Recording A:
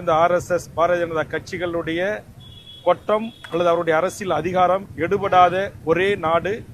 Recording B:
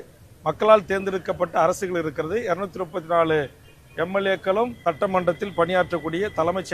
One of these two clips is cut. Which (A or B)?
B